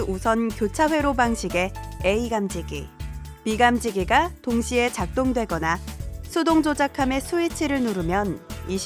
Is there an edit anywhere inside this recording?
no; 0 cuts

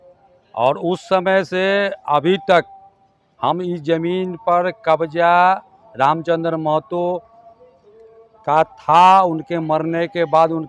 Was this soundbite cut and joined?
no; 0 cuts

